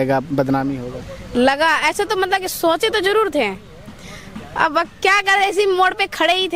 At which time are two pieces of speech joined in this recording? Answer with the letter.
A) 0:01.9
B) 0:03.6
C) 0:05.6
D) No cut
D